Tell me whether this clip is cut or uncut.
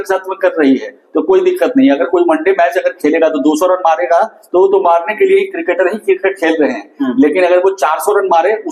uncut